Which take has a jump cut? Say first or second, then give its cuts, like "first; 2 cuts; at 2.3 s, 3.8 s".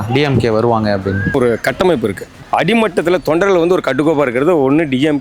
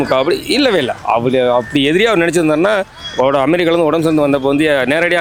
first; 2 cuts; at 1.3 s, 2.3 s